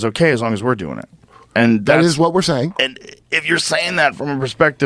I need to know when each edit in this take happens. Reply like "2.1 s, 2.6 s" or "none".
1.4 s